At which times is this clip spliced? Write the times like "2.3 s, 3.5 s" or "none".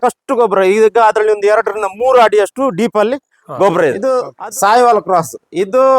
4.1 s